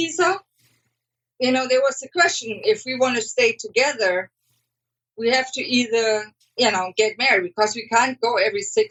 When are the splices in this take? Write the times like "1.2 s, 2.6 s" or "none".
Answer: none